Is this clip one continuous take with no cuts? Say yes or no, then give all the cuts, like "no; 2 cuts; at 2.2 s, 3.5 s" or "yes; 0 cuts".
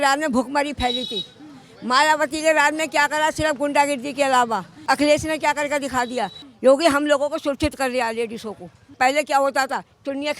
no; 3 cuts; at 4.8 s, 6.4 s, 8.9 s